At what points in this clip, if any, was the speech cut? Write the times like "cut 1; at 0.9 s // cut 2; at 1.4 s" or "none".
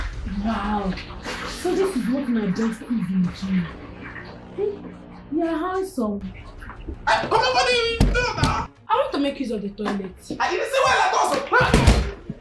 none